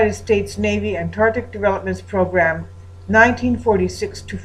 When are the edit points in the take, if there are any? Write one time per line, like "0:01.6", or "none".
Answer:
none

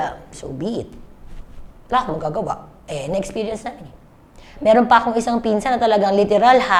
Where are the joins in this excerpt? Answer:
none

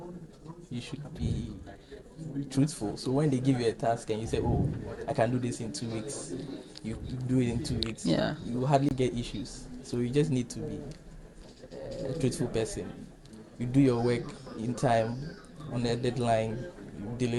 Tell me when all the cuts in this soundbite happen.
none

